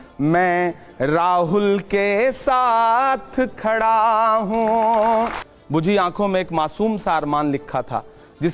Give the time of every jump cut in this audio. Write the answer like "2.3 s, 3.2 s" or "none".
5.5 s

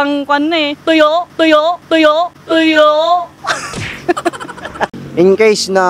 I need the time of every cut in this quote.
4.9 s

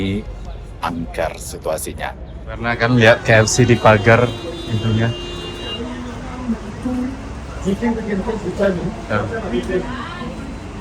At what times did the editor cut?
2.7 s

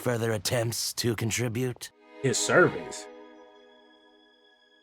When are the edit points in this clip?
1.9 s

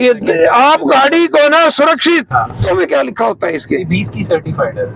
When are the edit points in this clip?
2.6 s

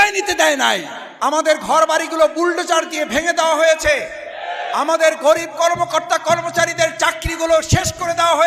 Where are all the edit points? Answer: 1.0 s

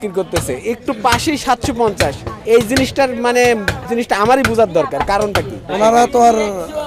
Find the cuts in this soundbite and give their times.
2.3 s, 3.8 s, 5.6 s

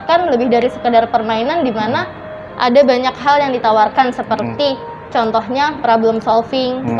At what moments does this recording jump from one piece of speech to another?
none

